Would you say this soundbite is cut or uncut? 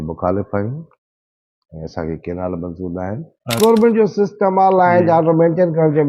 cut